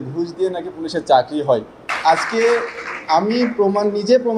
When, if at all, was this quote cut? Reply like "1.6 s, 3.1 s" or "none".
1.8 s